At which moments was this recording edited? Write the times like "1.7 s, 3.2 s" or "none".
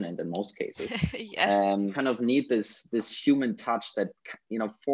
2.0 s